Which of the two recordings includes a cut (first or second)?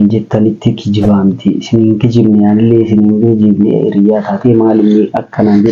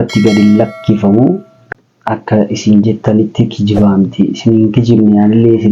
second